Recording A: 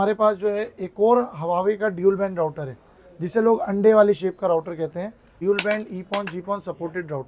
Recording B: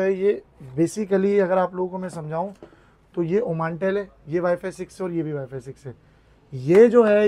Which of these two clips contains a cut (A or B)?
A